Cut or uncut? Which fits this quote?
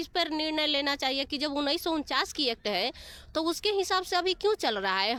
uncut